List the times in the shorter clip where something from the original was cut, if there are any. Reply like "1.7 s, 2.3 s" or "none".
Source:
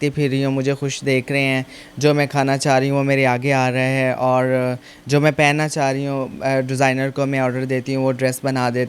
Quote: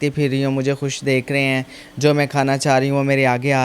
none